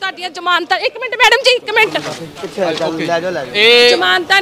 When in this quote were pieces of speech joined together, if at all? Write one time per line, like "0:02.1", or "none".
none